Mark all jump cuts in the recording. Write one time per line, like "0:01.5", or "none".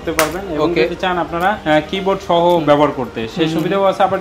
none